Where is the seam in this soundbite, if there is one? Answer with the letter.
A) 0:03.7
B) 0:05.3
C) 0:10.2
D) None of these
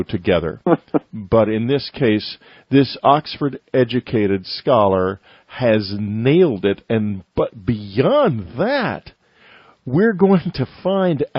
C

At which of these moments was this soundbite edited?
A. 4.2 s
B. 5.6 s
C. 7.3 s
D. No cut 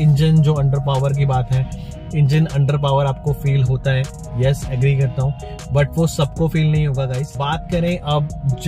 C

